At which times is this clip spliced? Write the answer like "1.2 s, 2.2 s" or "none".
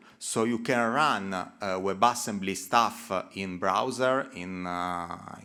none